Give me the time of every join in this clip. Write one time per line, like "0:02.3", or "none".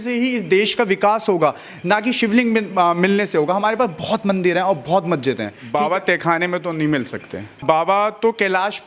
0:05.5
0:07.6